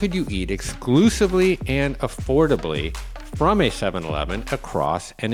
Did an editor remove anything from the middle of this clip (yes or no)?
no